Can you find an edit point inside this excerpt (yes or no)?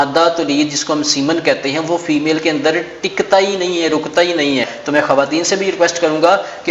yes